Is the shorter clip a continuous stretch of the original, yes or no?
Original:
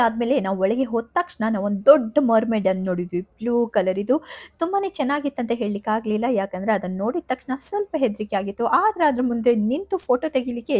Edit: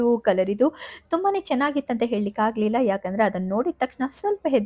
yes